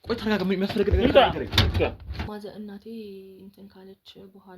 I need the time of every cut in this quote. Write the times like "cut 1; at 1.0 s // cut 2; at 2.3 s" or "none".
cut 1; at 2.1 s

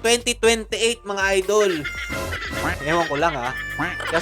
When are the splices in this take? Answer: none

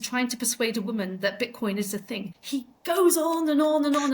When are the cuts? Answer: cut 1; at 2.3 s

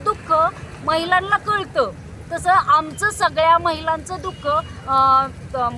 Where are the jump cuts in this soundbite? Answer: none

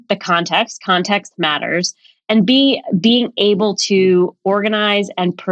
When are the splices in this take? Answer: none

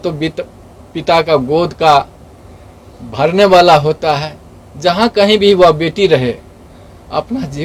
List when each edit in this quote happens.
none

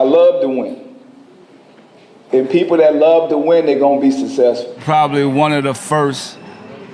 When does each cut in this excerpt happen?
cut 1; at 4.7 s

